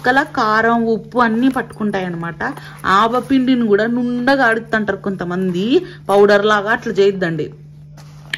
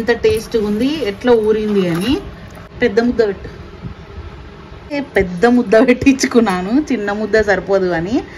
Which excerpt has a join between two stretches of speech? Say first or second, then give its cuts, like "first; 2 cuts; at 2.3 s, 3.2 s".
second; 2 cuts; at 2.6 s, 4.9 s